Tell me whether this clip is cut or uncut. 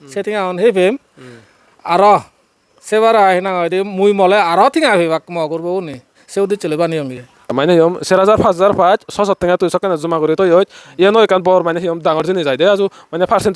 cut